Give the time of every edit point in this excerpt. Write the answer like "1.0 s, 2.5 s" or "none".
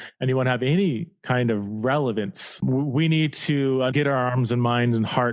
2.6 s, 3.9 s